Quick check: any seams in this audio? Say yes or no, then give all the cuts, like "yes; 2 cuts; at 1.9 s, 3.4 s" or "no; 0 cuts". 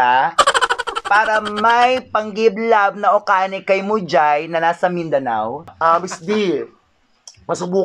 yes; 1 cut; at 5.7 s